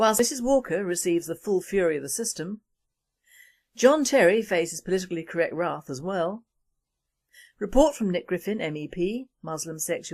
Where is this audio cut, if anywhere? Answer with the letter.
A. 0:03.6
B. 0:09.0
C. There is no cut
B